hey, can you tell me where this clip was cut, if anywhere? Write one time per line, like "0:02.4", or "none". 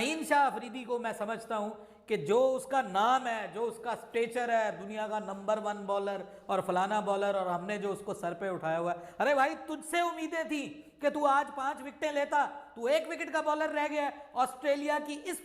none